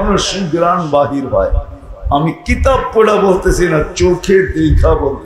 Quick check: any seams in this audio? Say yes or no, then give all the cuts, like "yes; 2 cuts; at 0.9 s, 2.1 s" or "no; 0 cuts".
no; 0 cuts